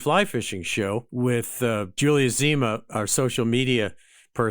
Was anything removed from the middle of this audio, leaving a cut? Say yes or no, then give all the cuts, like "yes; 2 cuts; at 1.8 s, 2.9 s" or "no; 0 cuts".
yes; 1 cut; at 1.4 s